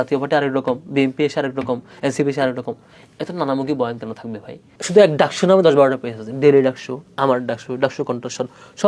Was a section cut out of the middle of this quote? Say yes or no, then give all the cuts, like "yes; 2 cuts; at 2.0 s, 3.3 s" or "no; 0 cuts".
yes; 1 cut; at 4.7 s